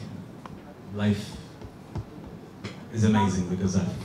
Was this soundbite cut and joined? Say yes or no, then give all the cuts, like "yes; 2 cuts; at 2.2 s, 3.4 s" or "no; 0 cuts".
no; 0 cuts